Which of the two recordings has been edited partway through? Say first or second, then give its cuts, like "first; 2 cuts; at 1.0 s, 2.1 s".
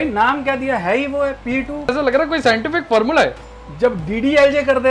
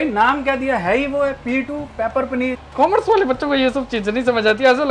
first; 2 cuts; at 1.9 s, 3.4 s